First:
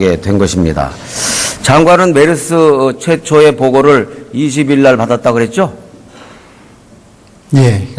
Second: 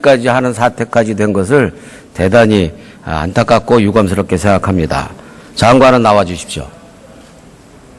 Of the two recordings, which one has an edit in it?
first; 1 cut; at 4.6 s

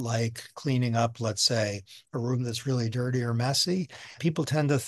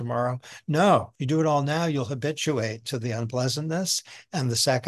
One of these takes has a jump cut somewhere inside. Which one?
second; 1 cut; at 1.1 s

